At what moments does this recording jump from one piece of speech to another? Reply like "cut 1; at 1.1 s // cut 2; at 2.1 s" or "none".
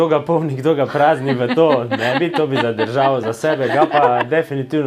none